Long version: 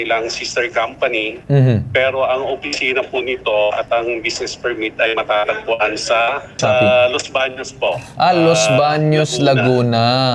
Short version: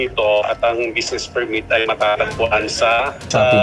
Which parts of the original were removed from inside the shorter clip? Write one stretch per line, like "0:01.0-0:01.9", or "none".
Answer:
none